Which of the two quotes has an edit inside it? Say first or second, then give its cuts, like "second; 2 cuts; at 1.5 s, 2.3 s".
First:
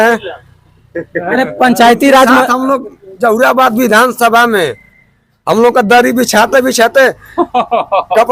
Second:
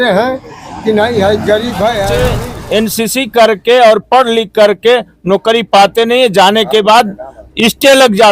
second; 1 cut; at 2.4 s